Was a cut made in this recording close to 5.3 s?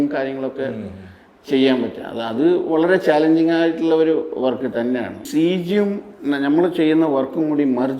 yes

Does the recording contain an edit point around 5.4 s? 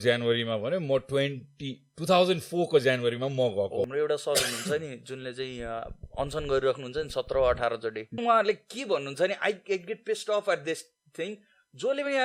no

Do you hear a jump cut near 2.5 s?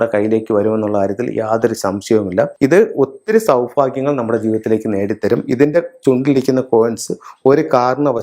yes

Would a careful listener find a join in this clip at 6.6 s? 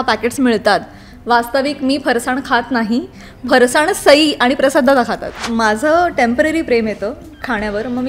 no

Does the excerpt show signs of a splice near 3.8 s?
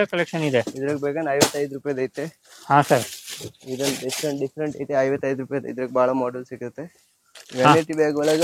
no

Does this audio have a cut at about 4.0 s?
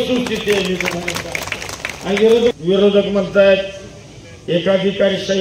no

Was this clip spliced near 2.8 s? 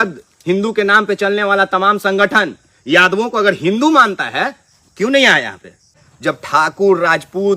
no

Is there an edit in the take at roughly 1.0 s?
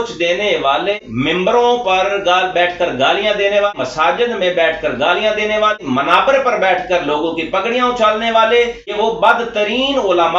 yes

